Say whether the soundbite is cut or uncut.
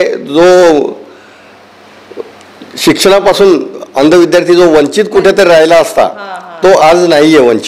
uncut